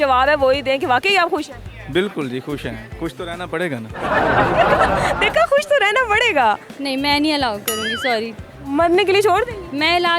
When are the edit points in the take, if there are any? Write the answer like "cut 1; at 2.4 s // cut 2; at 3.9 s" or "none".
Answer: cut 1; at 6.7 s